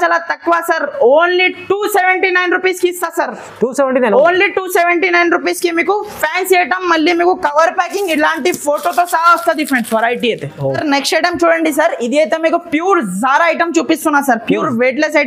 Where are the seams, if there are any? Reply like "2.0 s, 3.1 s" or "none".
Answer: none